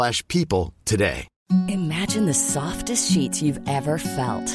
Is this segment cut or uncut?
cut